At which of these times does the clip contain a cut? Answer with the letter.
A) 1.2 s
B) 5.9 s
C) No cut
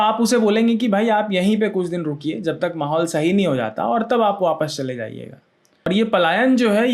B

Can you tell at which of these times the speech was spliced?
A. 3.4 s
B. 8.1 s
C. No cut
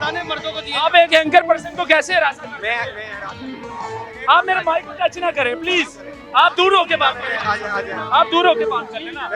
C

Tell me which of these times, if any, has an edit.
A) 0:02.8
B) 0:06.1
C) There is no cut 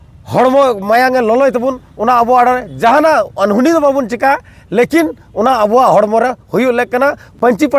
C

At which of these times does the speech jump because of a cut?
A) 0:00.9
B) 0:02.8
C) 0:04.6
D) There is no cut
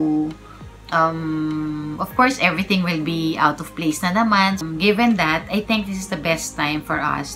C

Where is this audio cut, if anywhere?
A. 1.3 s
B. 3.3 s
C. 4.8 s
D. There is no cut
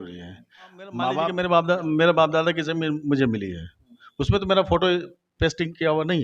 A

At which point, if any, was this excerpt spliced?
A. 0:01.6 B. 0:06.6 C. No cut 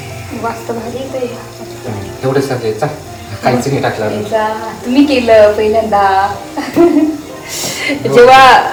C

